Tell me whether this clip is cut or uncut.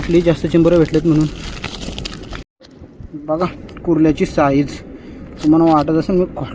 cut